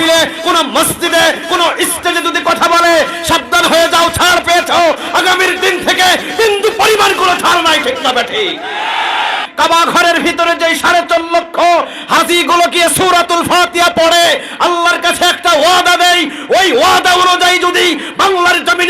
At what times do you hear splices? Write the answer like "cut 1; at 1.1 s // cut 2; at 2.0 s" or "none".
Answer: cut 1; at 9.4 s